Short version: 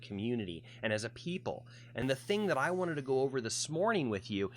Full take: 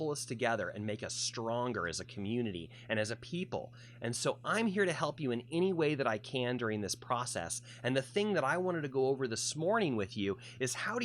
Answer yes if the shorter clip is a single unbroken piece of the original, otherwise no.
no